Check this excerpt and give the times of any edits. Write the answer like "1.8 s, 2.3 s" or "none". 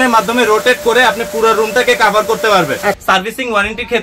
3.0 s